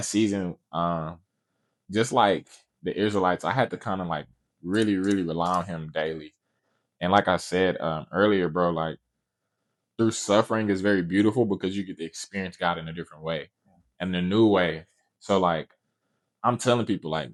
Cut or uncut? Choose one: uncut